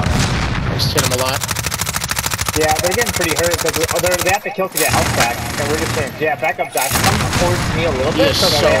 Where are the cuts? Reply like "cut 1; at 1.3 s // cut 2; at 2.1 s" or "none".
none